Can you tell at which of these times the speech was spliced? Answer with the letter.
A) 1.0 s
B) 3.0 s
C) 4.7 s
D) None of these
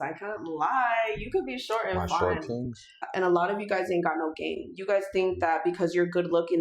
B